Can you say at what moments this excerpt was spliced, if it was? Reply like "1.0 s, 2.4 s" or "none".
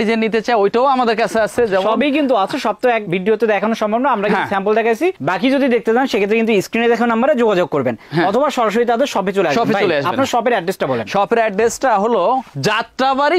none